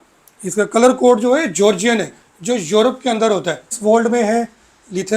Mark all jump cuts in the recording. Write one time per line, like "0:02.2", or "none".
0:03.8